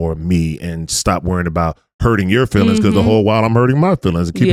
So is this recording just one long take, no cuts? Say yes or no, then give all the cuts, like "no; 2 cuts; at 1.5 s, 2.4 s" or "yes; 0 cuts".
yes; 0 cuts